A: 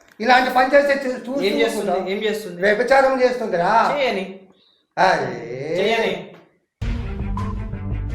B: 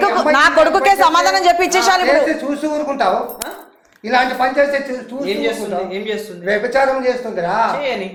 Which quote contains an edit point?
A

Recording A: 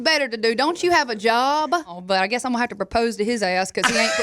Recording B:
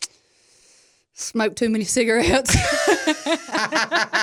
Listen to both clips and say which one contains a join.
A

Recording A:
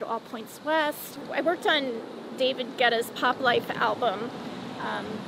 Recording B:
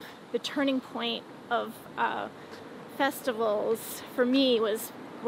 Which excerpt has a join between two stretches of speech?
A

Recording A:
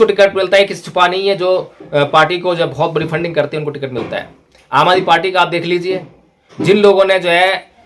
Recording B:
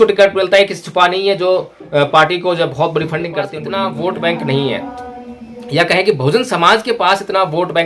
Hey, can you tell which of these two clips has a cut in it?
B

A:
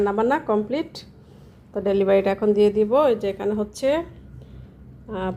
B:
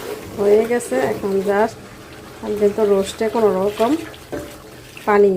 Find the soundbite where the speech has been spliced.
B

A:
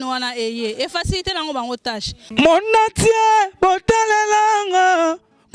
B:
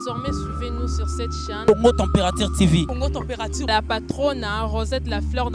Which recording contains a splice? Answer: A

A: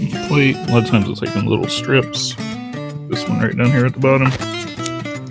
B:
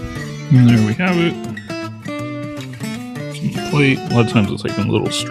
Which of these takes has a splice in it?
A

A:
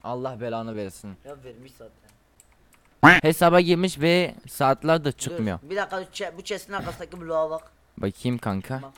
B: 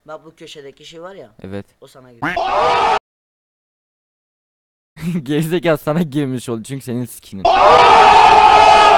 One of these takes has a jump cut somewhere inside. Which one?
A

